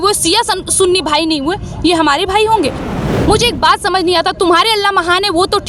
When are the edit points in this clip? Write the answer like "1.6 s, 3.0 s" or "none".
2.8 s